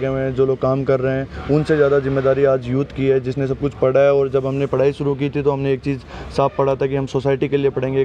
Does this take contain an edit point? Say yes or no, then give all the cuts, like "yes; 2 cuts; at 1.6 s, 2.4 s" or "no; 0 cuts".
no; 0 cuts